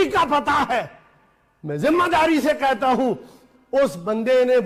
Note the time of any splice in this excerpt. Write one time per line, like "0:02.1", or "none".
none